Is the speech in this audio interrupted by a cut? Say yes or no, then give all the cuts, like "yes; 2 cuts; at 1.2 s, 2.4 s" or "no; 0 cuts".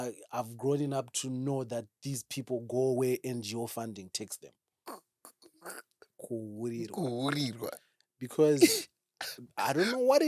yes; 1 cut; at 4.7 s